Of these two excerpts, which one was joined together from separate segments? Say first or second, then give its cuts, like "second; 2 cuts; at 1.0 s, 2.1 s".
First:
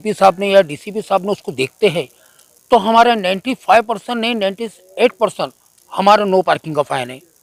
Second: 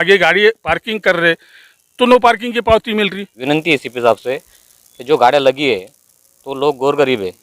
second; 1 cut; at 3.3 s